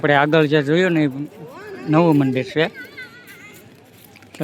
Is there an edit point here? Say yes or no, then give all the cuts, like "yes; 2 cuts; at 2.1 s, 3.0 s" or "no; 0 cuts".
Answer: no; 0 cuts